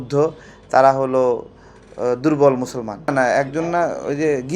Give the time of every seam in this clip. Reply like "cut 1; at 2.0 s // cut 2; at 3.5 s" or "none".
cut 1; at 3.1 s